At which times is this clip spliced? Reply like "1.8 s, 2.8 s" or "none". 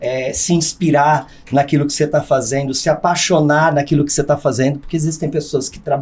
none